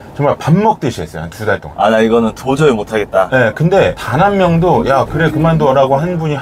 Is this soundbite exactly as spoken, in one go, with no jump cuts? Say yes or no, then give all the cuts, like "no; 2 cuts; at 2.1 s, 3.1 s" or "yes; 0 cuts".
yes; 0 cuts